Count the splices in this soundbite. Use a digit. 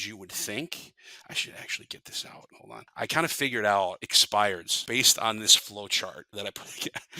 4